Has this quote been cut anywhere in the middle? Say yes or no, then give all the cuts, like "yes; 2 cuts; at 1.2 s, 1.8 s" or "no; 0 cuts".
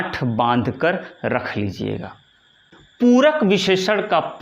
yes; 1 cut; at 2.8 s